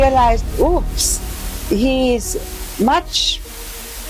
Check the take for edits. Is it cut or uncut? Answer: uncut